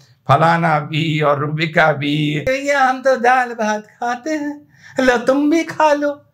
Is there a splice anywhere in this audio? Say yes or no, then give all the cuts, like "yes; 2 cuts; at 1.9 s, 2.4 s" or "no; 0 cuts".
yes; 1 cut; at 2.4 s